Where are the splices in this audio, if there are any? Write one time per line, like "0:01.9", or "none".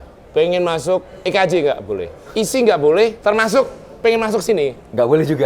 0:01.1
0:02.2
0:03.2